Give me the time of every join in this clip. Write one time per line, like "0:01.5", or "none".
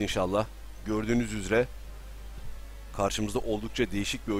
none